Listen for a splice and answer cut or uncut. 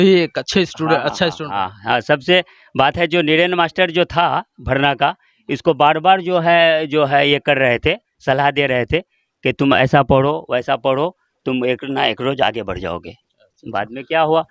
uncut